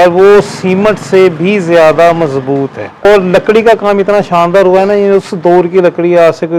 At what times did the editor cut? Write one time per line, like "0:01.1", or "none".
0:03.1